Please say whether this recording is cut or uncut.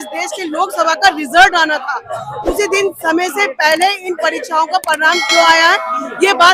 uncut